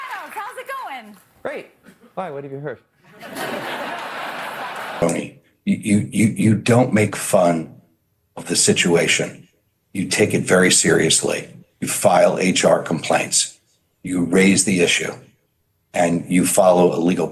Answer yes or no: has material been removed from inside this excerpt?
yes